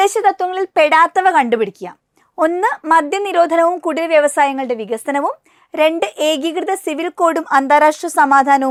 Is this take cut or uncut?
uncut